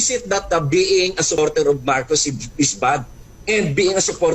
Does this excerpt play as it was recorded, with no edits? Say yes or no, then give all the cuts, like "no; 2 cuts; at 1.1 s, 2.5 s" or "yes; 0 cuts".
no; 1 cut; at 1.4 s